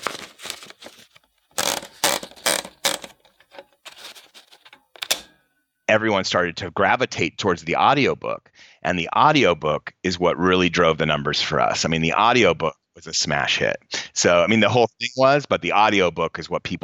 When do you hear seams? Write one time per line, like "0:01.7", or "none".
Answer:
0:05.7

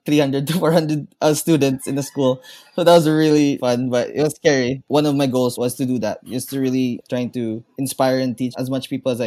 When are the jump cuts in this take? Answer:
0:03.6
0:04.8
0:05.5
0:07.0
0:08.5

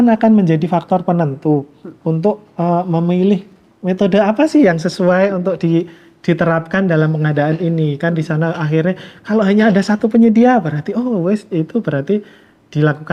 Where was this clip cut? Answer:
none

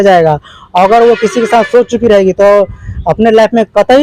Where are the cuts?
none

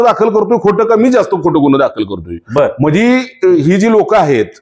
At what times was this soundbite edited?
none

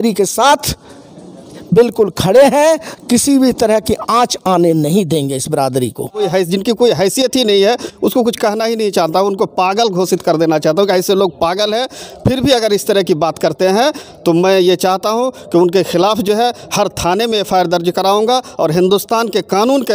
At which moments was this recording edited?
0:06.3

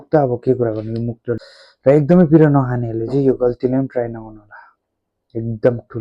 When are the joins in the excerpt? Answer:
0:01.4

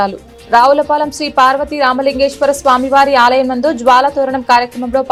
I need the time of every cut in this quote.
none

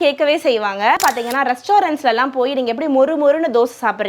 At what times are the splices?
0:01.0

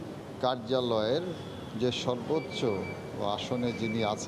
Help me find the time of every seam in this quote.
none

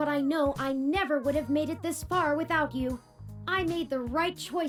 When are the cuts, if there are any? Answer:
none

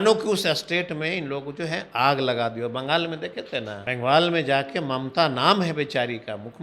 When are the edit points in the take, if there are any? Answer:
0:03.8

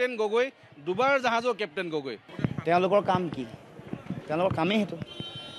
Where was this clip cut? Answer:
0:02.2

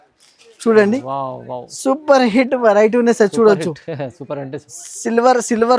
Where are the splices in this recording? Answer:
none

